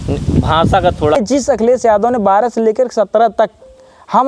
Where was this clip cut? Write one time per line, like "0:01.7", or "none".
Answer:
0:01.1